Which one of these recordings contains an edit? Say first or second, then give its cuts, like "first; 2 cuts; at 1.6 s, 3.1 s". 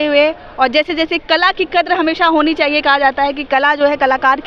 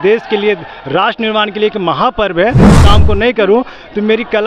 second; 1 cut; at 2.8 s